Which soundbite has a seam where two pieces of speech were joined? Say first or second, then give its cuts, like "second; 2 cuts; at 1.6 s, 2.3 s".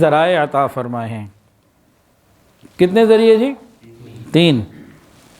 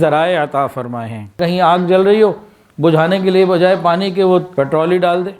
second; 2 cuts; at 1.4 s, 4.5 s